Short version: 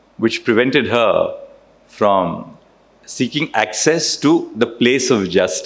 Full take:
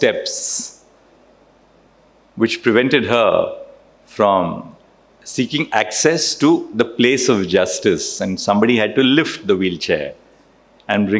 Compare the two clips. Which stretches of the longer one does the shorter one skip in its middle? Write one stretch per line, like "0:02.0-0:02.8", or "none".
none